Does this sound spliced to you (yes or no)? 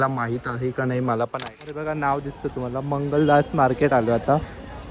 yes